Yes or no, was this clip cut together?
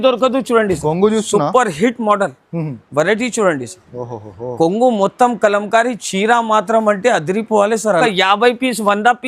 yes